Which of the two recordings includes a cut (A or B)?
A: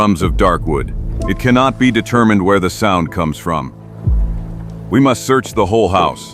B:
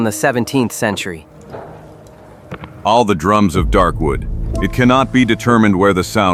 A